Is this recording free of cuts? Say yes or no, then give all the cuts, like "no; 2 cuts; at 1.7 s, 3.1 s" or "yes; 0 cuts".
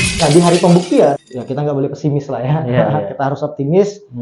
no; 1 cut; at 1.2 s